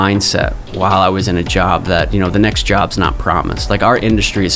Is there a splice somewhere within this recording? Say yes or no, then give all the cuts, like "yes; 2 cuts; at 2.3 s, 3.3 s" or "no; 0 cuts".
no; 0 cuts